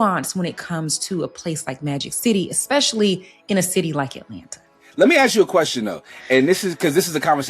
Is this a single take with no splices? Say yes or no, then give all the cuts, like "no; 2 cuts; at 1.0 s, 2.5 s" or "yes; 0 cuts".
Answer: no; 1 cut; at 4.8 s